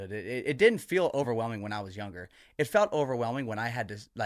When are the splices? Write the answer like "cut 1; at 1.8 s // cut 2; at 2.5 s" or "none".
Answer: cut 1; at 1.2 s